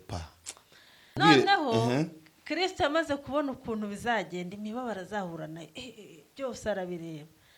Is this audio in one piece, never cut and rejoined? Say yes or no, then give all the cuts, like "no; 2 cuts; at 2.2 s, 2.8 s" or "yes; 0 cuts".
no; 1 cut; at 1.1 s